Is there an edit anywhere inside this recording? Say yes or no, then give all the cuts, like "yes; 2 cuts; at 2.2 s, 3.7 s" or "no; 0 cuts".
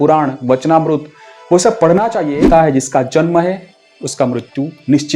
yes; 1 cut; at 2.4 s